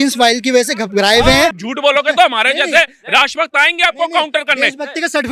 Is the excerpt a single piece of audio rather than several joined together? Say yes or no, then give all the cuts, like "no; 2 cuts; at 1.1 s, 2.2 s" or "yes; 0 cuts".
no; 1 cut; at 1.6 s